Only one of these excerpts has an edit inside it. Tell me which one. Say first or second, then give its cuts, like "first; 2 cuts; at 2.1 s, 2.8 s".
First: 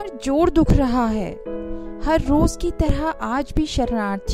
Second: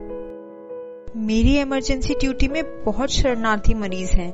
second; 1 cut; at 1.1 s